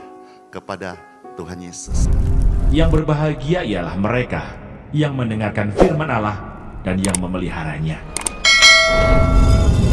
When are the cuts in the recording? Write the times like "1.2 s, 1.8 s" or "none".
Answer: 1.8 s